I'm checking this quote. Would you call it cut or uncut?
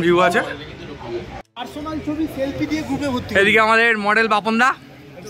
cut